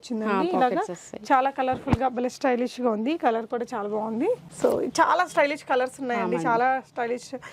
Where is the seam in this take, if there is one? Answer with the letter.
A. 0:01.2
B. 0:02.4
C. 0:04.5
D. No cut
C